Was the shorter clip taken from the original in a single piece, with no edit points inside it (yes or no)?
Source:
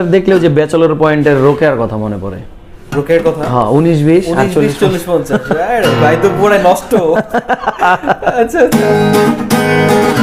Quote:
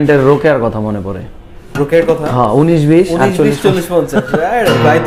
yes